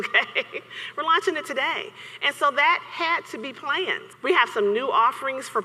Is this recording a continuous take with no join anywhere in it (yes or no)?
no